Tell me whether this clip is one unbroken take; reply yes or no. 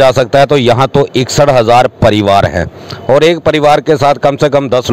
yes